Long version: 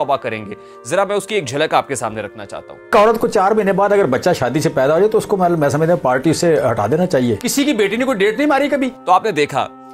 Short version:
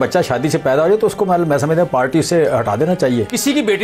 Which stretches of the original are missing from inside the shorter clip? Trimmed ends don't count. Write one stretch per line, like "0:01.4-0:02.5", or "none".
none

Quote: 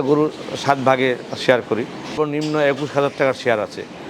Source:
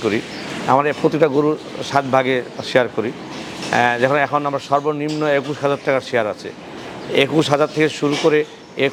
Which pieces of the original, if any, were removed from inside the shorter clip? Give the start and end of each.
0:03.4-0:04.8

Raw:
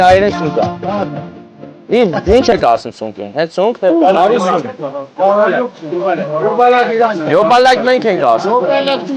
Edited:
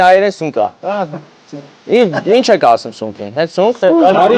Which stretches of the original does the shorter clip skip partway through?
none

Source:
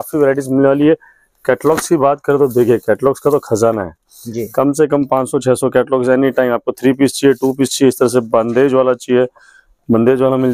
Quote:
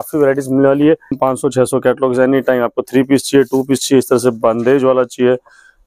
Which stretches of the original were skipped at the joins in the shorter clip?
0:01.1-0:05.0

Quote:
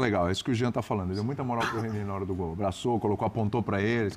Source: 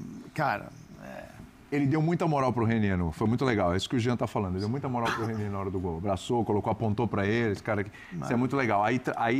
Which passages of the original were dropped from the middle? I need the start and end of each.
none

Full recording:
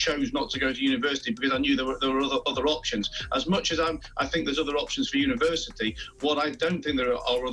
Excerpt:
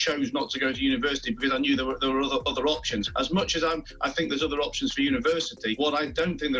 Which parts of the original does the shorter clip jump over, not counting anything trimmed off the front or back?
0:03.1-0:03.2
0:05.9-0:06.2

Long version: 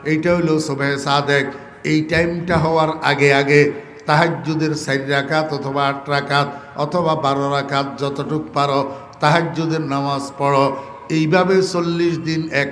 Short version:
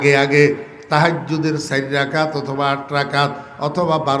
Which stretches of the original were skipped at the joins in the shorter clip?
none

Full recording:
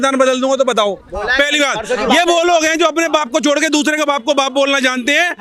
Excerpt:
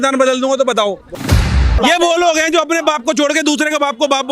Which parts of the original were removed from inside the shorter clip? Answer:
0:01.3-0:01.5

